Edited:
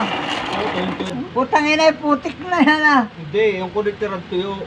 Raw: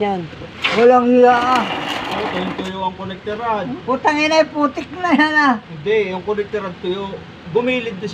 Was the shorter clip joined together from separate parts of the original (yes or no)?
yes